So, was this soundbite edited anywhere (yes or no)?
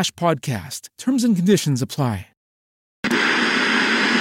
yes